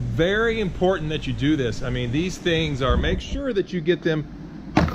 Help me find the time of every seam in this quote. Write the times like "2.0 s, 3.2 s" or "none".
none